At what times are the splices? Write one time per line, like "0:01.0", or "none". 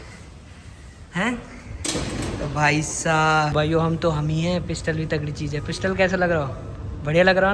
0:03.5